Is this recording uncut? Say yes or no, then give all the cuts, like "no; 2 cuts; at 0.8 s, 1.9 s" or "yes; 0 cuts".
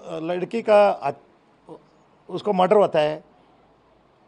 yes; 0 cuts